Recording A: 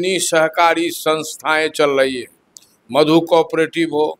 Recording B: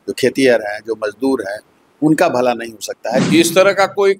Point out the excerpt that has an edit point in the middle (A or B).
B